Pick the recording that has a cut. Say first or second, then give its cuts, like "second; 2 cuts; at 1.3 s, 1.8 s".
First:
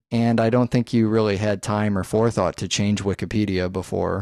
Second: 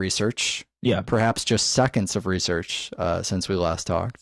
second; 1 cut; at 2.3 s